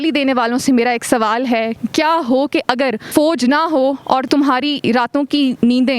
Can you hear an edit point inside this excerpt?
yes; 1 cut; at 3.0 s

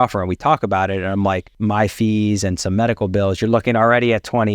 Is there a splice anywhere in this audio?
yes; 1 cut; at 1.5 s

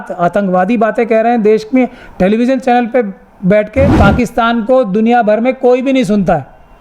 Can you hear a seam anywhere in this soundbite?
yes; 1 cut; at 3.9 s

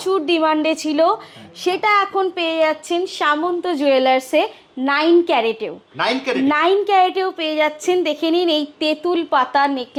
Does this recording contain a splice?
no; 0 cuts

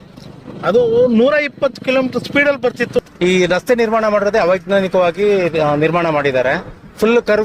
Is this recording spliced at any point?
yes; 1 cut; at 3.0 s

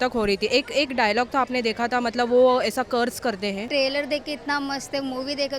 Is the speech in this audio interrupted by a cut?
yes; 1 cut; at 3.7 s

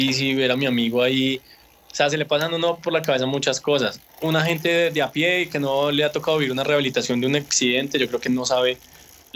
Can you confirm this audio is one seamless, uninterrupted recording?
no; 1 cut; at 4.1 s

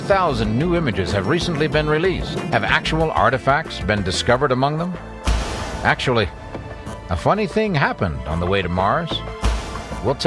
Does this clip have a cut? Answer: no; 0 cuts

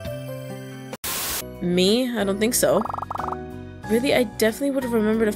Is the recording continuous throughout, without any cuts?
no; 1 cut; at 1.0 s

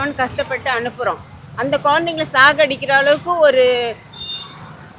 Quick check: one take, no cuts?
yes; 0 cuts

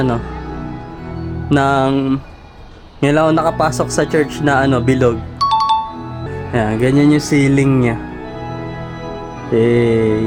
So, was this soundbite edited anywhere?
no; 0 cuts

